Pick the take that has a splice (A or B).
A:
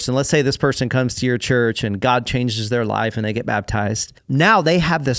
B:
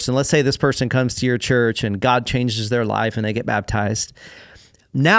A